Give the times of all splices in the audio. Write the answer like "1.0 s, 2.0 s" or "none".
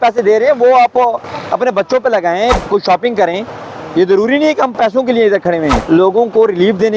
2.6 s, 5.8 s